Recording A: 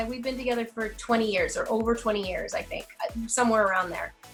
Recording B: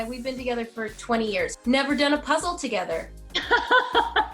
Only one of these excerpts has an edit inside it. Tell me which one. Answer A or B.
B